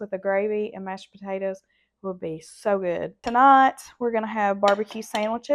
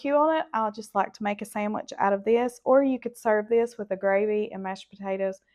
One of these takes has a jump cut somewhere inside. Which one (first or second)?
first